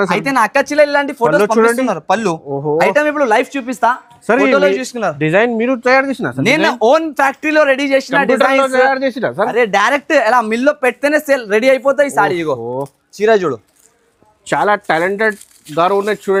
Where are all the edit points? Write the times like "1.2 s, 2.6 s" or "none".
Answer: none